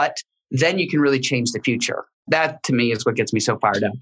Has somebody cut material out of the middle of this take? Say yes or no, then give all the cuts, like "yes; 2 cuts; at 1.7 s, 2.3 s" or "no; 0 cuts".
yes; 1 cut; at 2.2 s